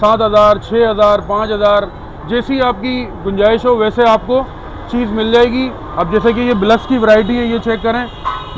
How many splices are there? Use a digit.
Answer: 0